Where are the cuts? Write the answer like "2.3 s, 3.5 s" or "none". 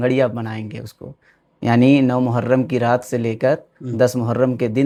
none